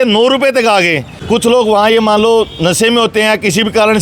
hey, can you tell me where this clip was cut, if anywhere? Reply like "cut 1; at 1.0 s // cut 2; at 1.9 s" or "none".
cut 1; at 1.1 s